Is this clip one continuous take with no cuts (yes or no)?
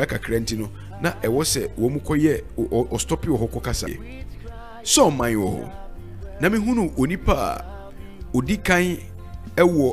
no